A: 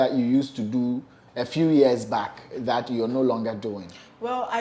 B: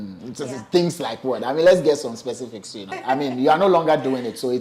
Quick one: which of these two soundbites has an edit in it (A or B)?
B